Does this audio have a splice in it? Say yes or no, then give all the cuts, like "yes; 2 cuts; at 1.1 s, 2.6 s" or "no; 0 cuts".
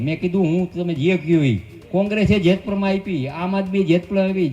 yes; 1 cut; at 1.8 s